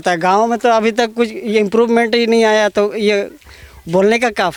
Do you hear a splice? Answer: no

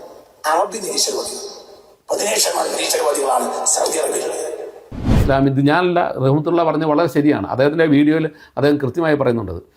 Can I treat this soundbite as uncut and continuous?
no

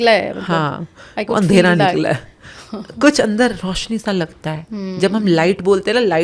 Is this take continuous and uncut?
yes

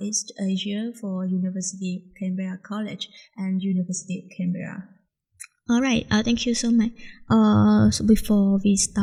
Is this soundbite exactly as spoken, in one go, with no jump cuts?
yes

